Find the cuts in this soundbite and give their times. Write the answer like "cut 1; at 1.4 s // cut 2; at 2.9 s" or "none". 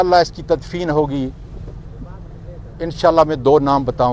none